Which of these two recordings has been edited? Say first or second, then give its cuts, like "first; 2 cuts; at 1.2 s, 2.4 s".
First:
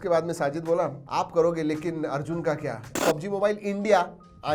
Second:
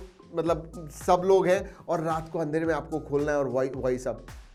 first; 2 cuts; at 1.0 s, 3.0 s